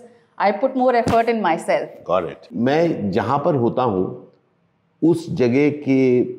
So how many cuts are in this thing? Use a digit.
1